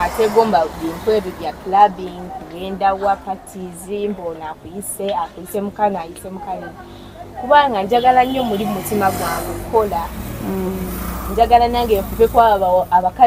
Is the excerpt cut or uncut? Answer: uncut